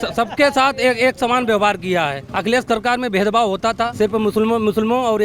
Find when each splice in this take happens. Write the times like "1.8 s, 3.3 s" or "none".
2.2 s, 3.9 s